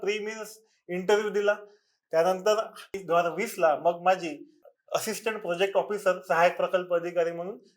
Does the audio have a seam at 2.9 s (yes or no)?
yes